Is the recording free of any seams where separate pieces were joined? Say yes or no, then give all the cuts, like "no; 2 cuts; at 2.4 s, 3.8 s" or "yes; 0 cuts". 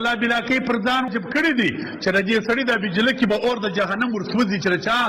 no; 1 cut; at 1.1 s